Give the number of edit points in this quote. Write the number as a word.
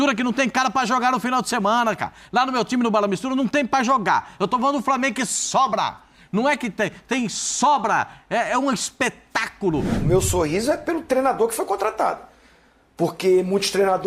one